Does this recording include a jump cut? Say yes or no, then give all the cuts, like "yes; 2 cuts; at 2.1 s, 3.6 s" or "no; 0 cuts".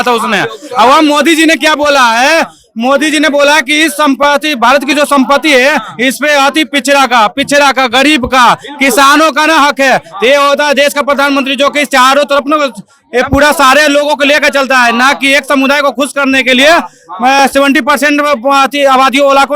no; 0 cuts